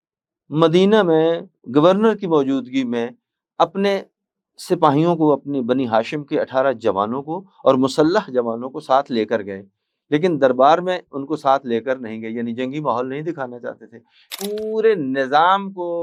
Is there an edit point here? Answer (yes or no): no